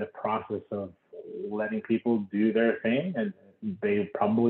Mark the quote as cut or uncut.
uncut